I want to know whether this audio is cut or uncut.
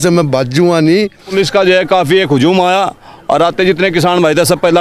cut